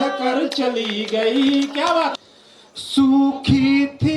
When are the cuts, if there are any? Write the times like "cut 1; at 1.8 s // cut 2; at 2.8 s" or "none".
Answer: cut 1; at 2.2 s